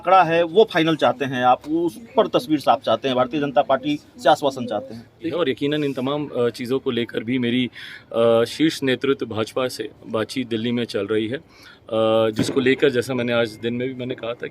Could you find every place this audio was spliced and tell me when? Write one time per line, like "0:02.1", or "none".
0:05.3